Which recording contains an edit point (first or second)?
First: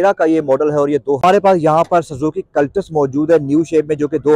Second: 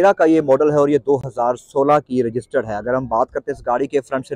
first